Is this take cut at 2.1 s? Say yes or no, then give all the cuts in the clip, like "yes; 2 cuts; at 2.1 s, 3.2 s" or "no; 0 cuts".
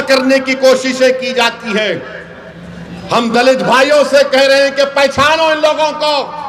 no; 0 cuts